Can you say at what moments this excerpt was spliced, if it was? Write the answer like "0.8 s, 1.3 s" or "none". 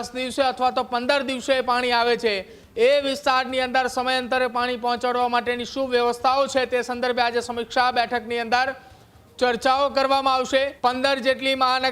10.7 s